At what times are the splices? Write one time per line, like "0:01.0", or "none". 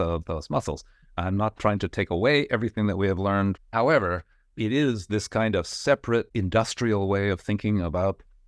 0:03.6
0:06.3